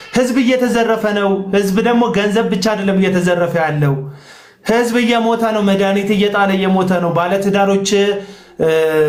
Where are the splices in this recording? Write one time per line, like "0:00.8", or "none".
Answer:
none